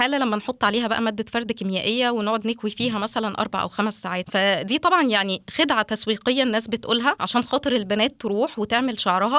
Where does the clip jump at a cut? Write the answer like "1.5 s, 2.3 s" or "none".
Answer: 4.3 s, 7.2 s